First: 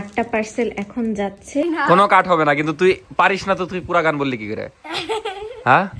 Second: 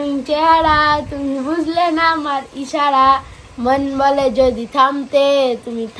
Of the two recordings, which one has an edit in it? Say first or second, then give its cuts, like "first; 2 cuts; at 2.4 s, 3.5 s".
first; 1 cut; at 1.6 s